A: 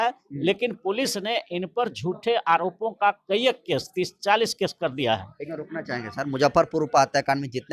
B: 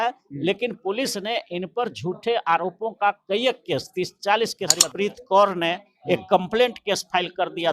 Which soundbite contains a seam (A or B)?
B